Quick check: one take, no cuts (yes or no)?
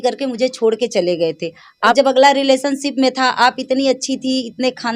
no